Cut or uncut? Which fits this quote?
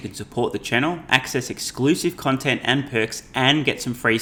uncut